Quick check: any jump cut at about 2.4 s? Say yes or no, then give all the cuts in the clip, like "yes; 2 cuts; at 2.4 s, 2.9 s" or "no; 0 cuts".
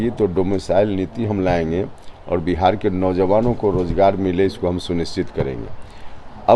no; 0 cuts